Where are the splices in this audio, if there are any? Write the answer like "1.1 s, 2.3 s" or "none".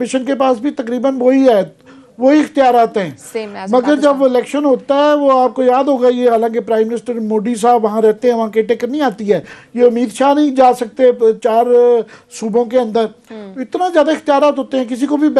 none